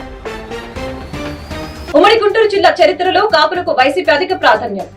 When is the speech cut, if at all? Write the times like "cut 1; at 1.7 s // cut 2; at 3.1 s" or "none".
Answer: cut 1; at 1.9 s